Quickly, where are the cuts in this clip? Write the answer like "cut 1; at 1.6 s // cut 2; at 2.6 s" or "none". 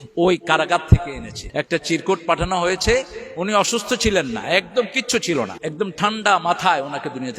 cut 1; at 1.3 s // cut 2; at 5.6 s